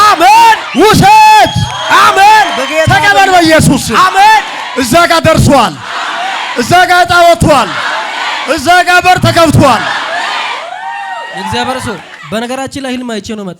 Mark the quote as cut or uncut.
uncut